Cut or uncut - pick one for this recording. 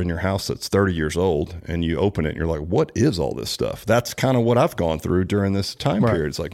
uncut